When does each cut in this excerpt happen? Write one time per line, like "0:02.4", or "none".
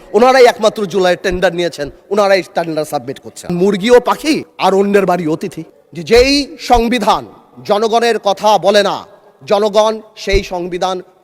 0:03.5
0:05.7